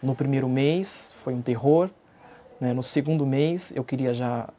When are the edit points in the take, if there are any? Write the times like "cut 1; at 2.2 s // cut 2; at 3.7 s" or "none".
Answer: none